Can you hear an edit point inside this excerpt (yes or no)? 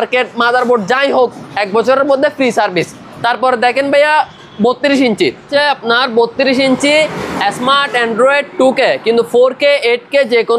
no